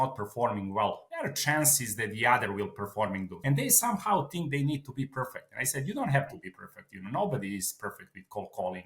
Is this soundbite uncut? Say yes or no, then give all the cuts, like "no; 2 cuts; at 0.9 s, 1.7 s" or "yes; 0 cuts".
no; 2 cuts; at 1.1 s, 3.3 s